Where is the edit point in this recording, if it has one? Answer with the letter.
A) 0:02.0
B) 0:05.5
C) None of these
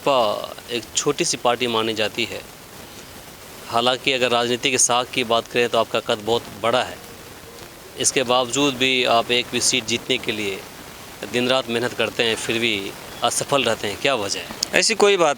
C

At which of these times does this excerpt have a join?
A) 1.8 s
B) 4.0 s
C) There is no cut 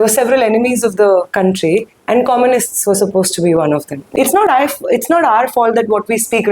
B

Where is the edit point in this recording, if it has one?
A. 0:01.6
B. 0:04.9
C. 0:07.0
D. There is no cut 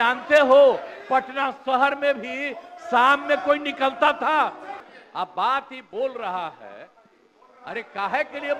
B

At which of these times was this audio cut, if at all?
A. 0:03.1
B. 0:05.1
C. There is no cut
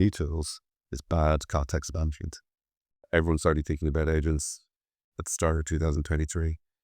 A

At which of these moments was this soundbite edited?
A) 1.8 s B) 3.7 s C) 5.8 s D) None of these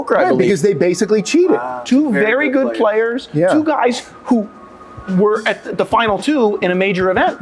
A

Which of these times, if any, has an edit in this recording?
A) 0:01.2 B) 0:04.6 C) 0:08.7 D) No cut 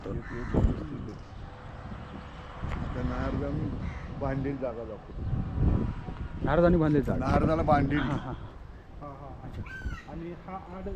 A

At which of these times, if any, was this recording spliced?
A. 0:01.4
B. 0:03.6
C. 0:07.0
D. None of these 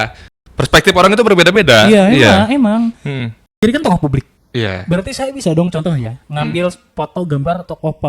B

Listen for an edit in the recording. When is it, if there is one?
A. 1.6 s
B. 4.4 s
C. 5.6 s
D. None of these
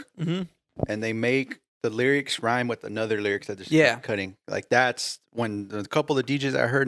A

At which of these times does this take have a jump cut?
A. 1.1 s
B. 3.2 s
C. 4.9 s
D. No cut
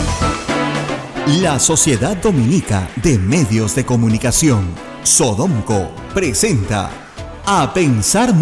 A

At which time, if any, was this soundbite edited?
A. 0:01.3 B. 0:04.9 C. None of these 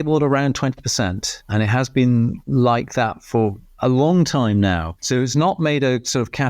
B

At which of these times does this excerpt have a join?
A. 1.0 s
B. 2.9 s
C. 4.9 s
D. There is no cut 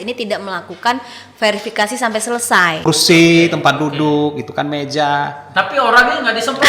B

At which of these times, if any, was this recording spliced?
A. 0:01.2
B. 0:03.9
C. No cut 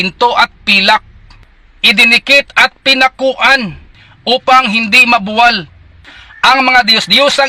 A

